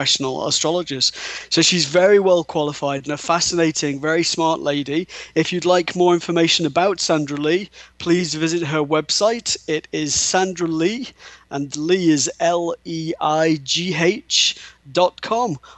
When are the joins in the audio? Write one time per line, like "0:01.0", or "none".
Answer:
0:13.5